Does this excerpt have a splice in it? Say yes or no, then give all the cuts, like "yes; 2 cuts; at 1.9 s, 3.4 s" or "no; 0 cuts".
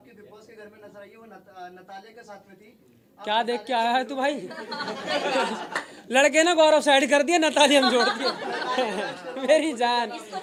no; 0 cuts